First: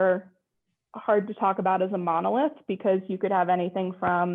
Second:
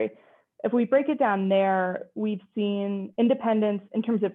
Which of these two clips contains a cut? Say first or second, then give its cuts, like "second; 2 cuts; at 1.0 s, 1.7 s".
second; 1 cut; at 3.1 s